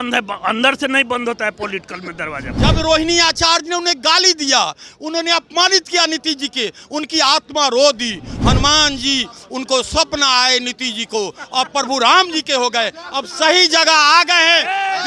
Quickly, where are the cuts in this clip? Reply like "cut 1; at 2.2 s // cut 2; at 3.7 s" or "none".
cut 1; at 2.4 s